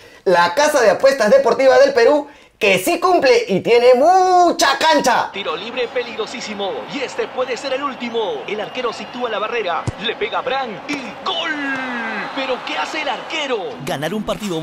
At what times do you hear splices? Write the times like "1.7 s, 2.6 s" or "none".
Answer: none